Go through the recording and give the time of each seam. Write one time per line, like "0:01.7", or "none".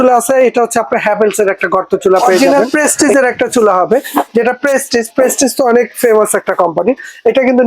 0:02.4